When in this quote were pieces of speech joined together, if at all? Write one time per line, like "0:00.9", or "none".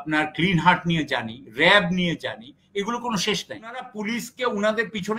0:03.9